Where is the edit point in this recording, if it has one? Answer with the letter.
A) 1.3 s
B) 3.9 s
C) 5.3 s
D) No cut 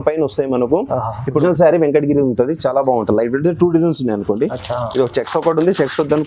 A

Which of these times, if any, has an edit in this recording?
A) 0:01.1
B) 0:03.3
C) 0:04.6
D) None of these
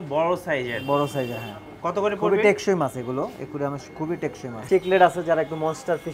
C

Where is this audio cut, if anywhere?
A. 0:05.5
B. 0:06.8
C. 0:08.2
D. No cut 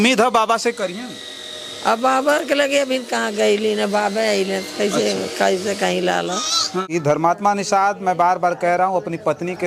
B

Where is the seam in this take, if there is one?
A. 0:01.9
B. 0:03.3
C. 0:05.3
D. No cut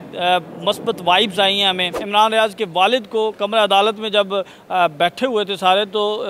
A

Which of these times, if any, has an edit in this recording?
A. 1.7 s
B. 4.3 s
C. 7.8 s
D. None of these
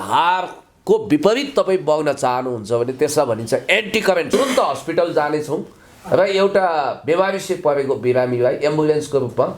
B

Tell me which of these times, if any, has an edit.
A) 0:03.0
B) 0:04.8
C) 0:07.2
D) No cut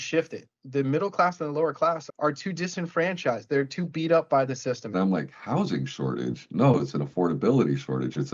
B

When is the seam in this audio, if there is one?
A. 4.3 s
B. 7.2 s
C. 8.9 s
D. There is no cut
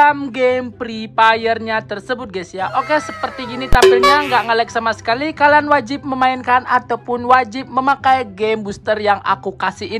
D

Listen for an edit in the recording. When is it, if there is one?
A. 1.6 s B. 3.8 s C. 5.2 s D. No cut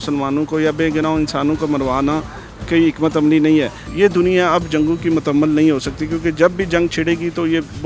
B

